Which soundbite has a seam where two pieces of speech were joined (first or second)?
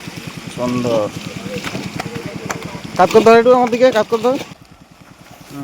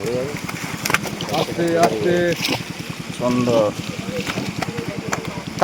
first